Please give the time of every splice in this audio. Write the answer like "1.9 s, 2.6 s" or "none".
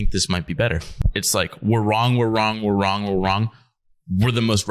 0.9 s